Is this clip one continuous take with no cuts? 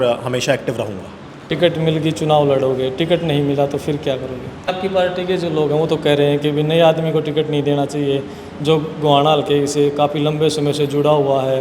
no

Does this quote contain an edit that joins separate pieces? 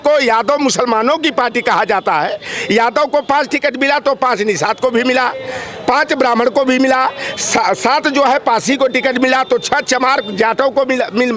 no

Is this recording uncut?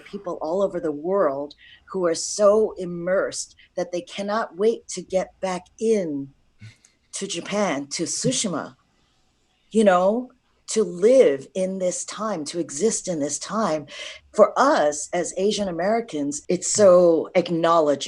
no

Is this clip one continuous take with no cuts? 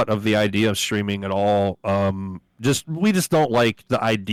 yes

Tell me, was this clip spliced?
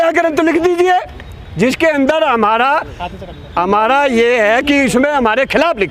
no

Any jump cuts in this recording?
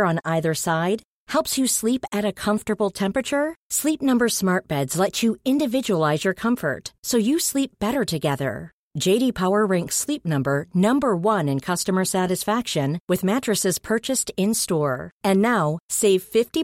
no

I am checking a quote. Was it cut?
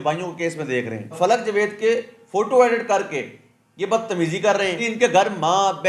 yes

